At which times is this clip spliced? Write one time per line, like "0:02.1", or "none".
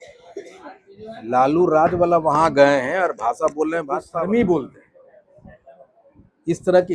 0:04.1